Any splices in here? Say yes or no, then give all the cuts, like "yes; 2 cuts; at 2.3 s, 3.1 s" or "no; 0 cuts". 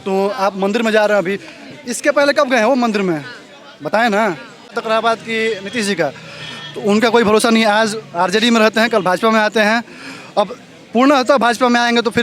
yes; 1 cut; at 4.8 s